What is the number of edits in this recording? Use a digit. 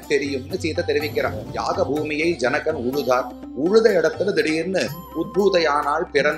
1